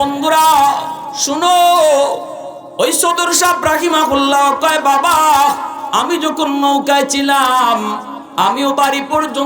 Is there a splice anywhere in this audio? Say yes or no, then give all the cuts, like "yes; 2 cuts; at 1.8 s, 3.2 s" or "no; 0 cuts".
no; 0 cuts